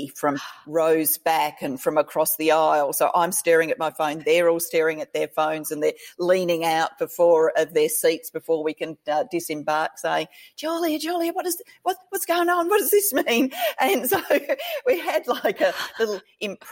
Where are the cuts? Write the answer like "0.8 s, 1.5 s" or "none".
none